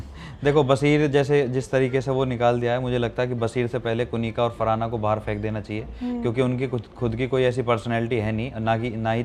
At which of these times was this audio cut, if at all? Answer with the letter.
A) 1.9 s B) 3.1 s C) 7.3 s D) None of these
D